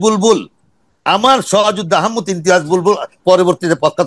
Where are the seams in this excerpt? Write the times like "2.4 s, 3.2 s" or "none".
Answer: 3.1 s